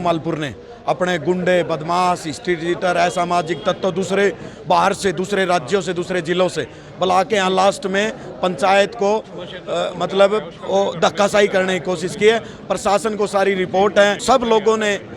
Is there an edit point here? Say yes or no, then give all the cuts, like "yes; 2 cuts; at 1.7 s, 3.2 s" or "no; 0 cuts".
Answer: yes; 1 cut; at 14.2 s